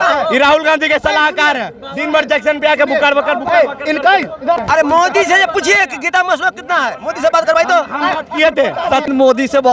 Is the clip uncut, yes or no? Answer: no